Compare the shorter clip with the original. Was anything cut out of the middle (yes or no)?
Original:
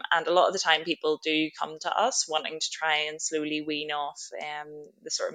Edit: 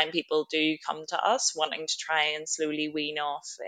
no